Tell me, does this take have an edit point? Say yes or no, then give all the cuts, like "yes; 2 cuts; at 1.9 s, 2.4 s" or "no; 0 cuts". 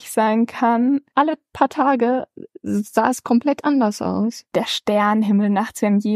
yes; 2 cuts; at 1.0 s, 4.5 s